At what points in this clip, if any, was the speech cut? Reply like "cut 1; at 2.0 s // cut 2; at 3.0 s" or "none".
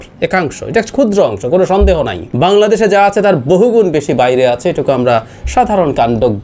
cut 1; at 2.2 s